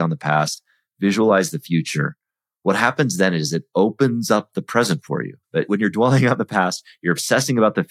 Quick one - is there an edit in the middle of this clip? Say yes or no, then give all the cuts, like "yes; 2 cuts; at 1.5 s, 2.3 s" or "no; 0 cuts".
yes; 1 cut; at 5.7 s